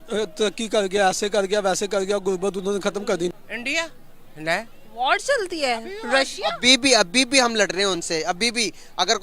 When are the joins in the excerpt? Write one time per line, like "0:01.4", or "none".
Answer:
0:03.3

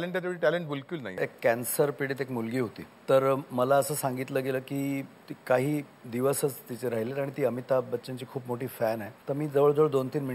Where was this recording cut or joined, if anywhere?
0:01.2
0:02.9
0:09.1

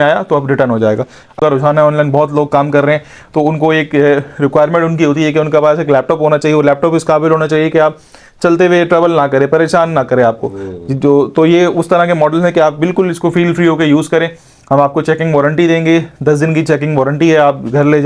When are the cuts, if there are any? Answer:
0:01.4

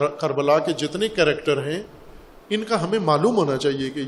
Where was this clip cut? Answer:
none

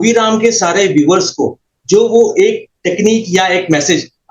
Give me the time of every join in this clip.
none

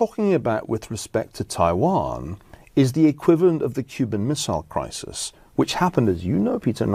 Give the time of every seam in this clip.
none

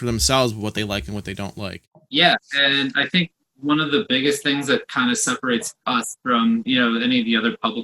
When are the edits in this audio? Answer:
0:01.9

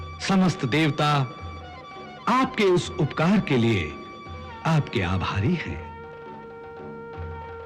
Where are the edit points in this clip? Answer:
none

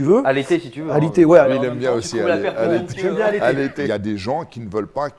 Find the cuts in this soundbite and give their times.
0:01.5
0:03.8

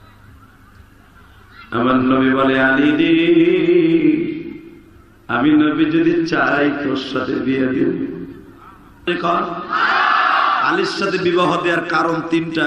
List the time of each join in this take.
0:09.1

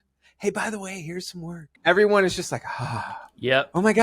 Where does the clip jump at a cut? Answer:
0:01.7

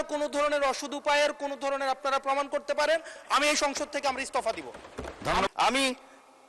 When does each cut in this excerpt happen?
0:05.5

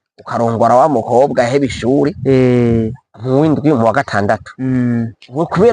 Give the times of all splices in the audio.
none

